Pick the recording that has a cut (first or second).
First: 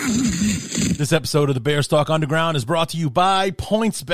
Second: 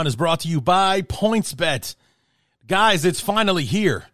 first